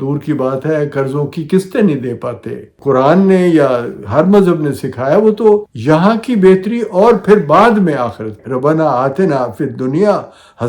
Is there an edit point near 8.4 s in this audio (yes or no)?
yes